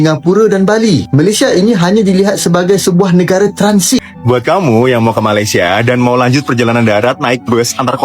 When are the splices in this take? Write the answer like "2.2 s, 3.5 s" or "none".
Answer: 4.1 s